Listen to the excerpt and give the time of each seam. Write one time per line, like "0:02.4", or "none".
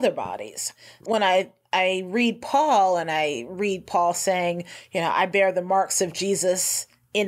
0:01.0